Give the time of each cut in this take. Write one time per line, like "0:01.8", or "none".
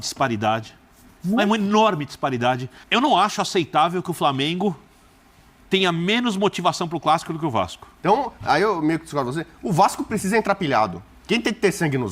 0:02.7
0:07.9